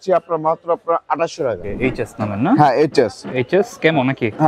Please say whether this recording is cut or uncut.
cut